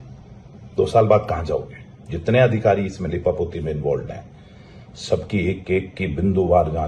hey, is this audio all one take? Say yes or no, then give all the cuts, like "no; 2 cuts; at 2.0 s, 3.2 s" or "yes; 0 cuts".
yes; 0 cuts